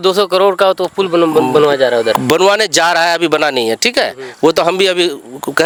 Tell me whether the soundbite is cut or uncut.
uncut